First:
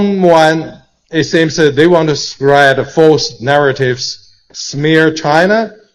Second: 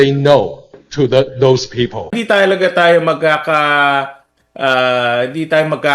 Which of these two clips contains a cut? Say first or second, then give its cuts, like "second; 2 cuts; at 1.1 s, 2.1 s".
second; 1 cut; at 2.2 s